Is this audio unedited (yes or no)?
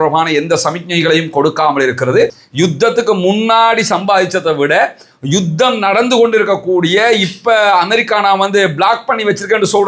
no